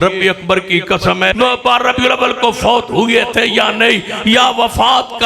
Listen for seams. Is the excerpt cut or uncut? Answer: cut